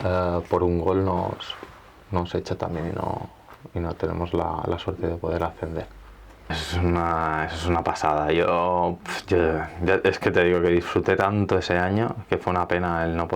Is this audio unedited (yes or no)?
no